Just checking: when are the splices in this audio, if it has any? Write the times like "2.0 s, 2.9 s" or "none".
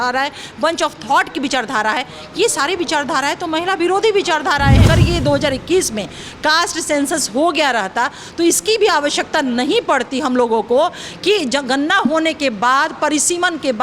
4.9 s